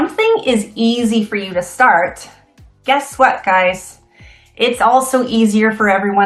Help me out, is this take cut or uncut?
uncut